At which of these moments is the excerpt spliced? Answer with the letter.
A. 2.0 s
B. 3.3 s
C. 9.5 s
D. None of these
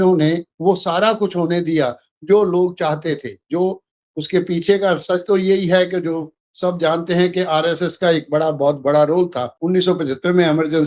C